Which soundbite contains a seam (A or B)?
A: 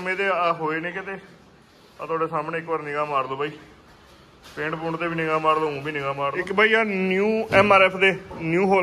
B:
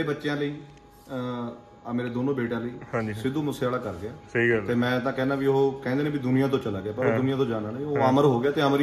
A